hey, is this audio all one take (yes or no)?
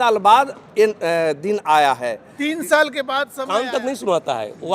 no